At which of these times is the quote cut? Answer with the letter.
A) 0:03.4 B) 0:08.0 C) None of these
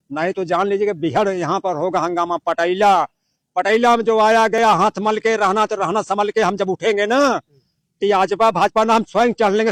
C